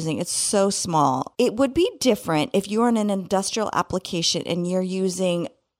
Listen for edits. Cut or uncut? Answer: uncut